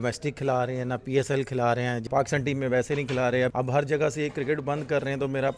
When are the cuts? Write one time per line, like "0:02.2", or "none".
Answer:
0:02.0
0:03.5